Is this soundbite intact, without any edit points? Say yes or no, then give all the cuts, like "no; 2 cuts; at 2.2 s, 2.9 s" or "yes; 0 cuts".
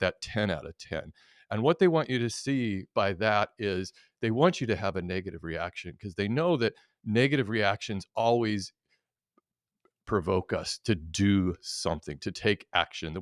yes; 0 cuts